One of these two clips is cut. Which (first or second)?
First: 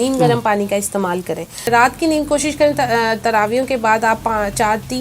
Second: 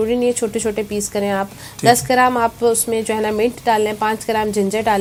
first